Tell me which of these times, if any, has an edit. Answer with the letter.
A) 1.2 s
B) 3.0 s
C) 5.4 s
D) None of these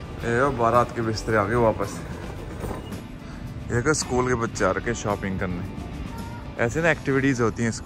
B